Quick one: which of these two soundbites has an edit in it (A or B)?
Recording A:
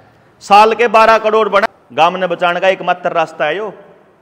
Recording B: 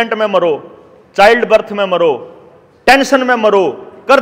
A